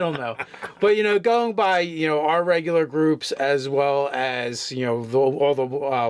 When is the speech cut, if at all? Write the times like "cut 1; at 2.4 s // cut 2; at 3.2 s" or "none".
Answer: cut 1; at 5.0 s

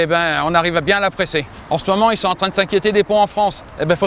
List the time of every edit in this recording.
cut 1; at 1.6 s

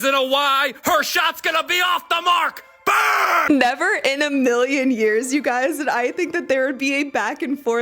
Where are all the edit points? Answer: cut 1; at 3.4 s

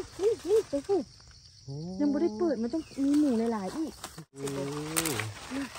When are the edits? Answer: cut 1; at 4.2 s

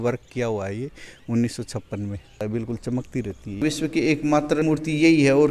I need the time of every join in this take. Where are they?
cut 1; at 2.4 s // cut 2; at 3.6 s // cut 3; at 4.6 s

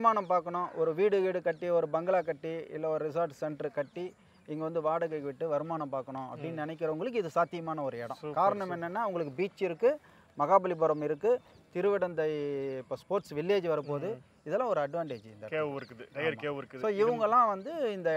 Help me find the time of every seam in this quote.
none

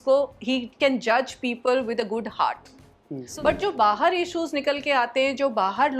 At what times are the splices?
cut 1; at 3.2 s

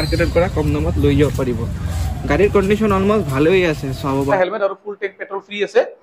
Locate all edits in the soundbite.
cut 1; at 4.2 s

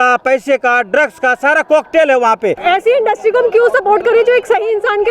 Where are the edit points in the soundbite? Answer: cut 1; at 2.6 s

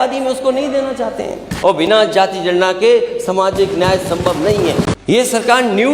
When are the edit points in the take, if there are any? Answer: cut 1; at 1.5 s // cut 2; at 4.9 s

